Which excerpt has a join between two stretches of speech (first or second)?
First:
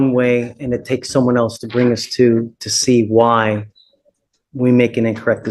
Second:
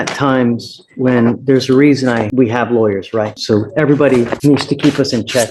second